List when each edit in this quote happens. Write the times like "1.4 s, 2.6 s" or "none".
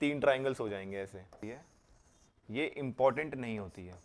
1.4 s